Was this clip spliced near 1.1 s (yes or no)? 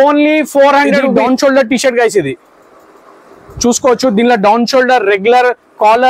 yes